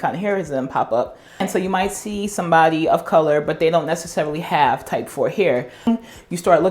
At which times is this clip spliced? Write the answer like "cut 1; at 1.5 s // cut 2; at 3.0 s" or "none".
cut 1; at 1.4 s // cut 2; at 5.9 s